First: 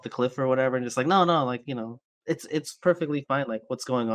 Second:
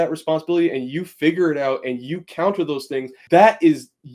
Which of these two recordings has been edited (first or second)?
second